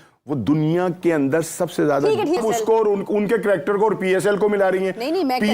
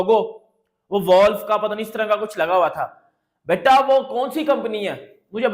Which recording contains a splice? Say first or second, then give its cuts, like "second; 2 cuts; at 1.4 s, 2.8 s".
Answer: first; 1 cut; at 2.4 s